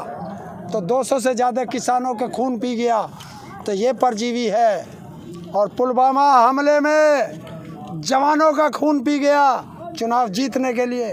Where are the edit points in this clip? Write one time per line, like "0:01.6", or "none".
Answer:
none